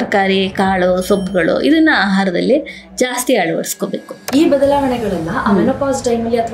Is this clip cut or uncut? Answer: cut